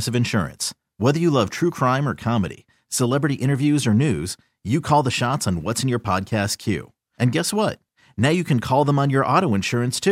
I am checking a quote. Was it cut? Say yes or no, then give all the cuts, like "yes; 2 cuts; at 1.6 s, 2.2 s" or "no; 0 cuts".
no; 0 cuts